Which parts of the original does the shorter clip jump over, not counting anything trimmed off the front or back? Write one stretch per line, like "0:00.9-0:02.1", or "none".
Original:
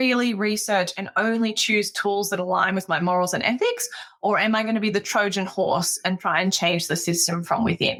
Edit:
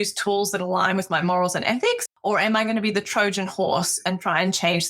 0:03.9-0:04.1

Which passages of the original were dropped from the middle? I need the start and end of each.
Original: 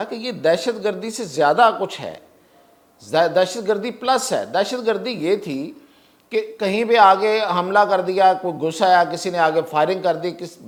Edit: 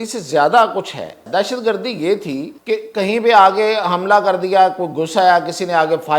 0:02.3-0:04.5
0:05.7-0:06.2

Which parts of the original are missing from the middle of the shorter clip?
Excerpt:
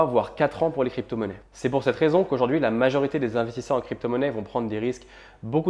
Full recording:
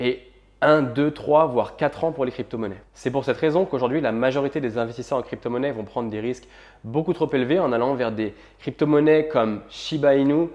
none

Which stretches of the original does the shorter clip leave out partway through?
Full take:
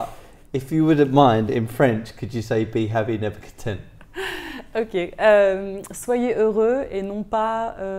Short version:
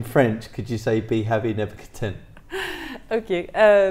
none

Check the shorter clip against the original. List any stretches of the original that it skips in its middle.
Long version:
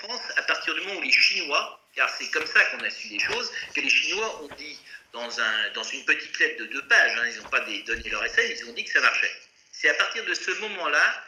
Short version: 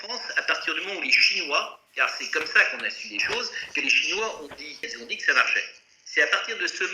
0:04.9-0:08.5

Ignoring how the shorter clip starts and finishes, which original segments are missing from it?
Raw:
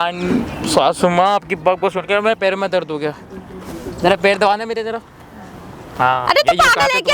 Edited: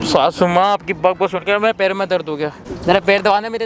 0:03.3-0:03.8

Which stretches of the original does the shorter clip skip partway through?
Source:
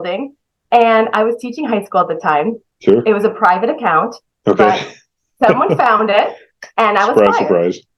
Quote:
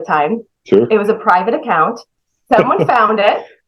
0:04.2-0:05.0

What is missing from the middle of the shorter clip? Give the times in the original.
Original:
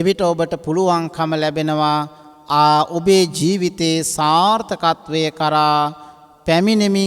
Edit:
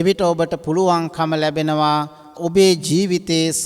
0:02.4-0:02.9

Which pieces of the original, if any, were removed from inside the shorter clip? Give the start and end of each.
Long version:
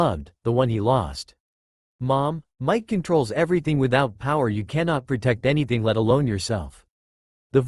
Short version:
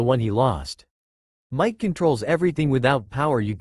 0:01.9-0:02.5

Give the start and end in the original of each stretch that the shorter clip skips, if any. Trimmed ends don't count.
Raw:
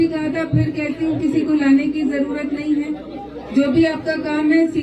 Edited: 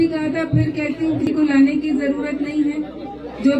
0:01.2-0:01.3

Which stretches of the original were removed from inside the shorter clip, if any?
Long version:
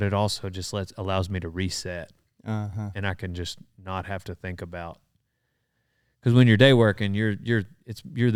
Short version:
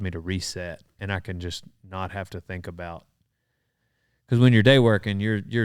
0:02.3-0:02.9

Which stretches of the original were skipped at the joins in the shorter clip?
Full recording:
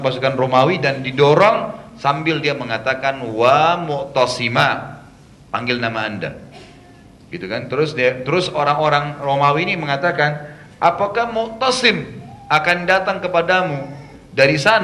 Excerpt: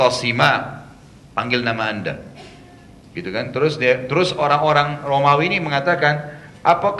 none

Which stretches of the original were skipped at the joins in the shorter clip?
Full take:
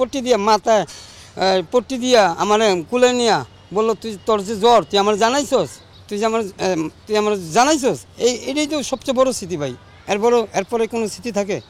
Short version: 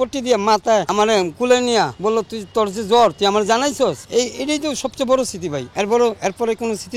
0:00.9-0:02.4
0:03.5-0:03.7
0:05.7-0:08.1
0:09.7-0:10.0

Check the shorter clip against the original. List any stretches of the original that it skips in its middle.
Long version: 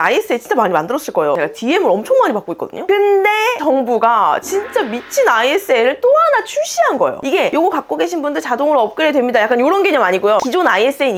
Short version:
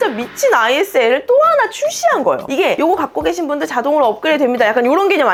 none

